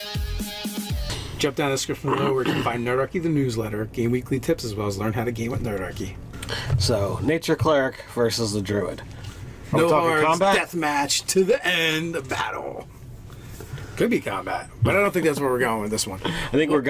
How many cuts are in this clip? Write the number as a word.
one